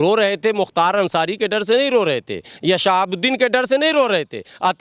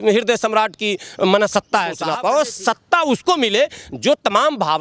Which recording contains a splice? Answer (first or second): second